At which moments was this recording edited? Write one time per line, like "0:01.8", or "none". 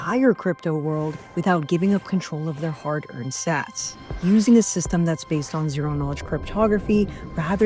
none